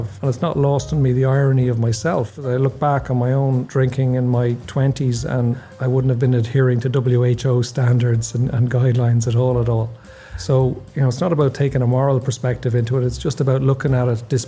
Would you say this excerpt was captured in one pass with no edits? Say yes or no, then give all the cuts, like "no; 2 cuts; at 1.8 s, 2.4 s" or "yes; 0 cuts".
no; 3 cuts; at 2.4 s, 3.7 s, 5.7 s